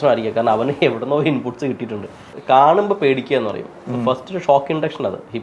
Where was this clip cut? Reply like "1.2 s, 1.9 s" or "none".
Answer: 2.3 s